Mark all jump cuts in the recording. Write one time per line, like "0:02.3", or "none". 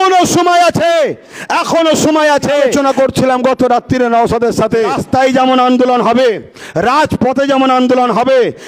0:02.7
0:05.0